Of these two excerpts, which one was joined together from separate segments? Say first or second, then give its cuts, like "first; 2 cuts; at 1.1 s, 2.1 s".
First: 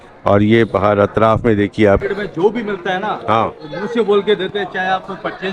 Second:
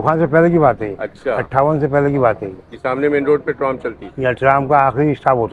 first; 1 cut; at 2.0 s